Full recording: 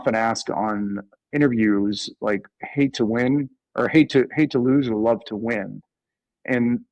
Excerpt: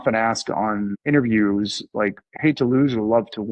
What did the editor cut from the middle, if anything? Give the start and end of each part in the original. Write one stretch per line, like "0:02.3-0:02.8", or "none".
0:00.9-0:01.2
0:02.6-0:04.3